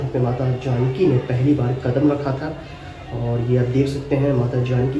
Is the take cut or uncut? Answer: uncut